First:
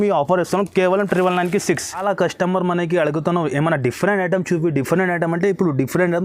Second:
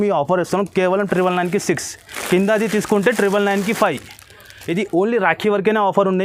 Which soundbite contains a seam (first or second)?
first